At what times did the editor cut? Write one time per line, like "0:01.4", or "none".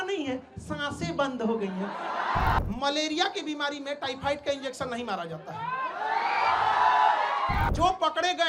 0:02.6
0:07.7